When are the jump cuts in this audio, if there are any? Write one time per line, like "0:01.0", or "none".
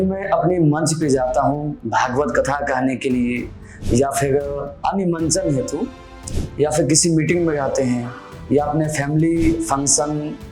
0:04.7